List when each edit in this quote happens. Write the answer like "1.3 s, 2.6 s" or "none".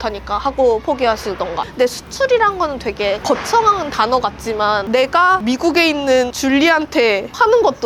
1.6 s